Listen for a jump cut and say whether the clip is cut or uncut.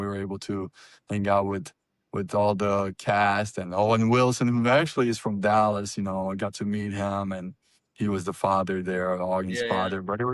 uncut